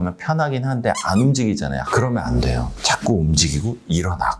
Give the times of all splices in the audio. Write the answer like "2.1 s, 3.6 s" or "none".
1.8 s